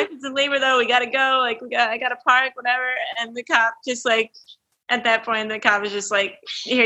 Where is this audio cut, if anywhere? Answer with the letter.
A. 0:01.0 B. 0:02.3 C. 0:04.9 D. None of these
D